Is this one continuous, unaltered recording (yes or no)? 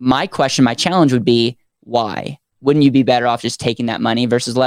no